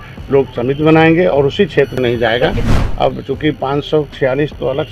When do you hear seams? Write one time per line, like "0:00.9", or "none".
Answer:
0:02.8